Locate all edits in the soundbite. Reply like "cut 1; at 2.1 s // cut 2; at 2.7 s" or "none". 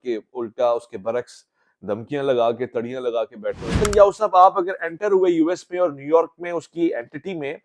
cut 1; at 3.7 s